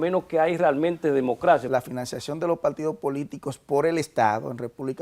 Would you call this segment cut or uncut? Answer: cut